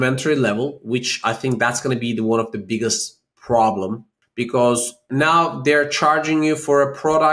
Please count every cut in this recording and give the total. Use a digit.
2